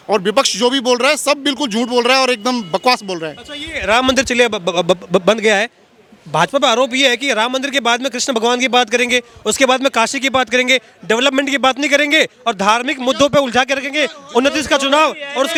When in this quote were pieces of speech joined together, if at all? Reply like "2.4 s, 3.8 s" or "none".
none